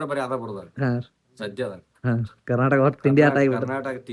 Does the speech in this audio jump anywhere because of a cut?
no; 0 cuts

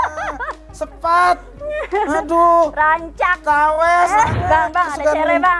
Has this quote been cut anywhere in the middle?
yes; 1 cut; at 4.4 s

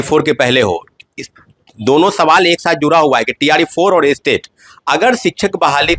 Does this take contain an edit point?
no; 0 cuts

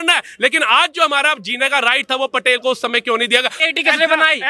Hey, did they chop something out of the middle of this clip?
yes; 1 cut; at 3.6 s

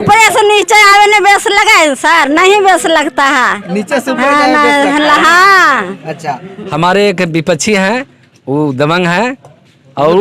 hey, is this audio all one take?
no; 1 cut; at 6.5 s

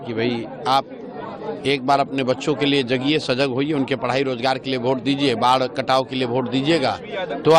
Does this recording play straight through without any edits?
yes; 0 cuts

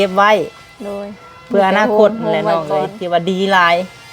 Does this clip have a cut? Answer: yes; 1 cut; at 3.0 s

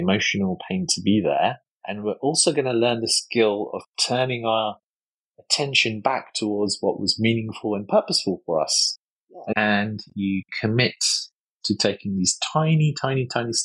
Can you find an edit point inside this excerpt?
yes; 1 cut; at 9.5 s

